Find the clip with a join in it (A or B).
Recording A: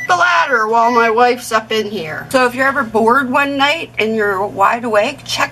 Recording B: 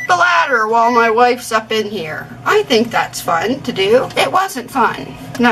A